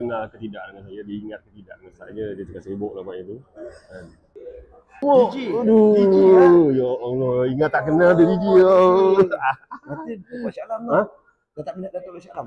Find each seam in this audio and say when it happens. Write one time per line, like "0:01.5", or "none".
0:01.9

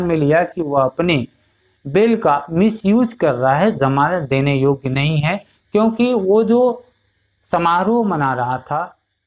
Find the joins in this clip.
none

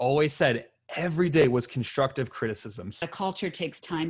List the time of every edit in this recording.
0:03.0

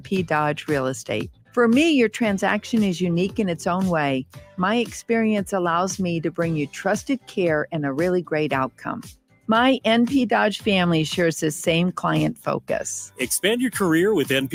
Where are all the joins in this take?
none

